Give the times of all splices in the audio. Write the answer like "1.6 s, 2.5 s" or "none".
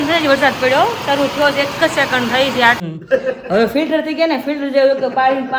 2.8 s